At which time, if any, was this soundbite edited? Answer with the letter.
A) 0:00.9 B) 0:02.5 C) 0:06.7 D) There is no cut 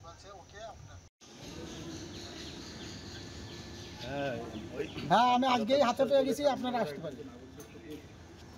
A